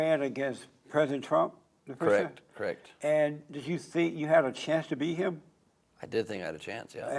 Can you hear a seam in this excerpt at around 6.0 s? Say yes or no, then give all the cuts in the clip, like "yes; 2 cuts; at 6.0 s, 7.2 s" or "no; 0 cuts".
no; 0 cuts